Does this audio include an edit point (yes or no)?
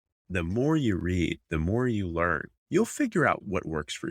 yes